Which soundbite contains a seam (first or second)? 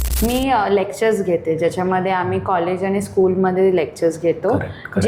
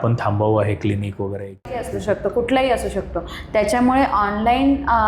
second